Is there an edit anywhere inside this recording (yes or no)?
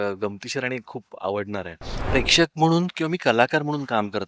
yes